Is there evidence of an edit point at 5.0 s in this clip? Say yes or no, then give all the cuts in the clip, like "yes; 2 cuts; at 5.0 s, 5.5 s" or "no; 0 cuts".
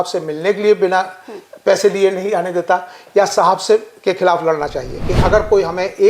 yes; 1 cut; at 5.0 s